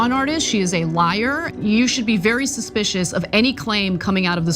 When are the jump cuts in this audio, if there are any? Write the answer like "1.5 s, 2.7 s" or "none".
1.5 s